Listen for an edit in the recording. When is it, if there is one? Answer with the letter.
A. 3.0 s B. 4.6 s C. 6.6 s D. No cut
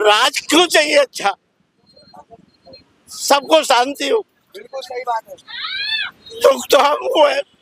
D